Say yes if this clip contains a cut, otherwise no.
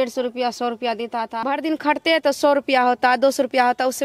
yes